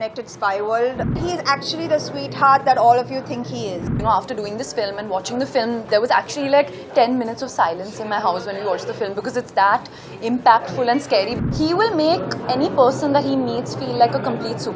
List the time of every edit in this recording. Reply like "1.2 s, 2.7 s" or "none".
1.2 s, 3.9 s, 11.4 s